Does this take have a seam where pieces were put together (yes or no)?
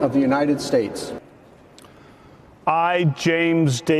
yes